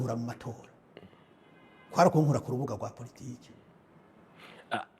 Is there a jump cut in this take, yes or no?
no